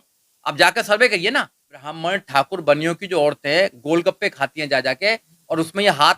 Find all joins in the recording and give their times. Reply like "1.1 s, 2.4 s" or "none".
2.0 s